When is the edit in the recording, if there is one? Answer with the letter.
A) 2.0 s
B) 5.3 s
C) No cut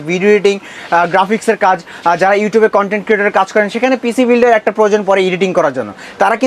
C